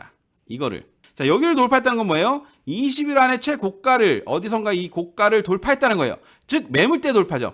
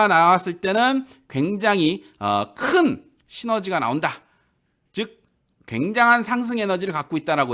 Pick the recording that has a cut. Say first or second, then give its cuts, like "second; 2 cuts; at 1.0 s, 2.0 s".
first; 1 cut; at 1.0 s